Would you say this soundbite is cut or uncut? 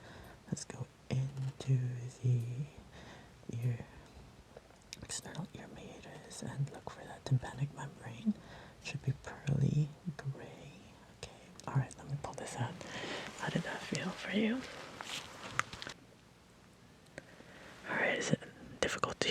cut